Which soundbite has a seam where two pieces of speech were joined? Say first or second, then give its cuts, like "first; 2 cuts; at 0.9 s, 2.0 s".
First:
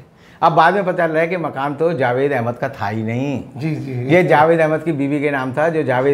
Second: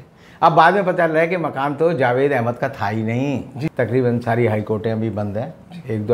second; 1 cut; at 3.7 s